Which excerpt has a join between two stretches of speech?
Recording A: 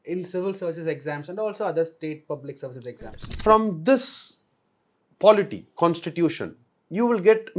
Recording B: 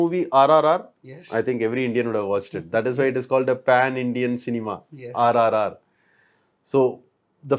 A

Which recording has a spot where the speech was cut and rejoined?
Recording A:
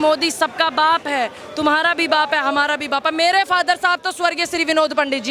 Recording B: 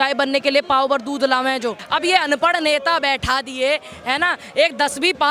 B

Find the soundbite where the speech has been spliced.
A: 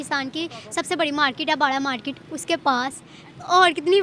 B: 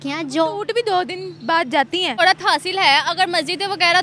B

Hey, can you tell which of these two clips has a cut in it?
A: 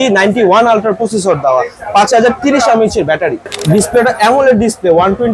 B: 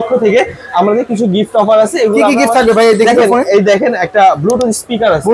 A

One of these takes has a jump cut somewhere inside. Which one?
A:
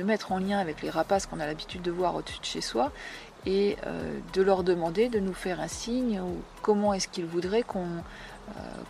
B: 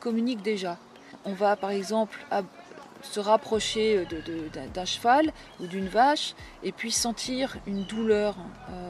B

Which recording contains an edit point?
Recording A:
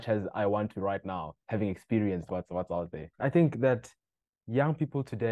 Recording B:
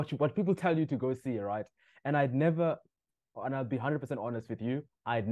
A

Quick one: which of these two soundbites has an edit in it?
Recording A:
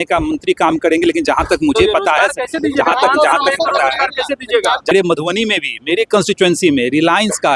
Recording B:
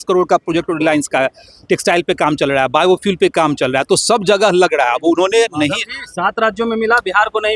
A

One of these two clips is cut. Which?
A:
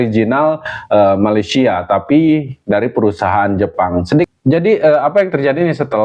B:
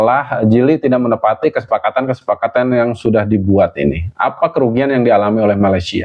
A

